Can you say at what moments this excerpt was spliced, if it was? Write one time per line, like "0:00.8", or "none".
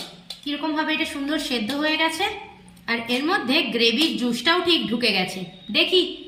none

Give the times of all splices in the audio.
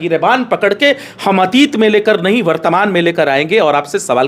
none

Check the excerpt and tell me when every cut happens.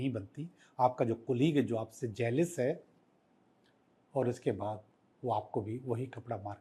none

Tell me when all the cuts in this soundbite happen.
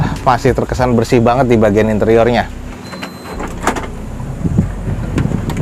none

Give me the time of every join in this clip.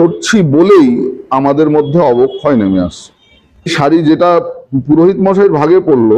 0:03.7

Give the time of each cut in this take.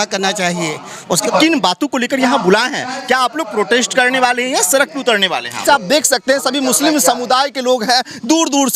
0:01.2
0:05.6

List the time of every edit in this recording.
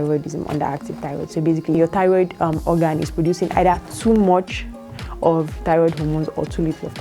0:01.8

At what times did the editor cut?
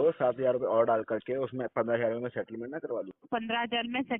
0:03.2

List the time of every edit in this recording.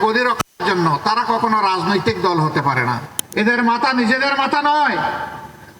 0:03.1

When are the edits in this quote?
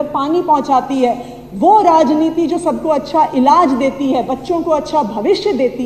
none

